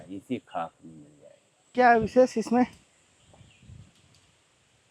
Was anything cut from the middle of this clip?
no; 0 cuts

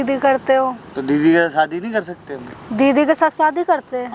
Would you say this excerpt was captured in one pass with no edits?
yes; 0 cuts

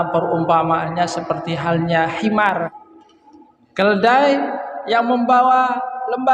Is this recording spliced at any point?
yes; 1 cut; at 2.7 s

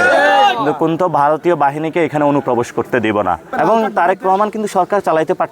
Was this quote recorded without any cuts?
no; 1 cut; at 3.4 s

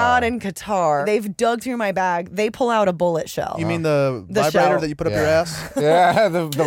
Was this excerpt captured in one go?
no; 2 cuts; at 1.0 s, 3.6 s

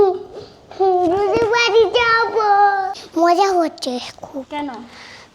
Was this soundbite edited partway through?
yes; 1 cut; at 3.0 s

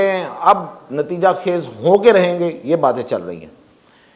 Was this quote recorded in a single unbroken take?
yes; 0 cuts

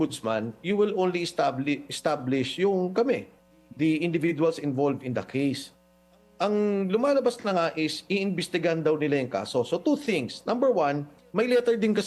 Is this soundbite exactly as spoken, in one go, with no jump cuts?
yes; 0 cuts

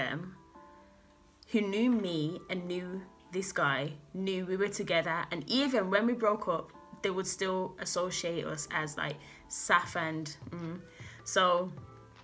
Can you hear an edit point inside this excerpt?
no; 0 cuts

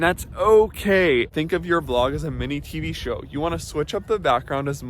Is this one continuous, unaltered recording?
no; 1 cut; at 1.3 s

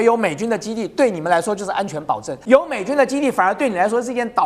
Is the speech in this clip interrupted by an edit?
yes; 1 cut; at 2.3 s

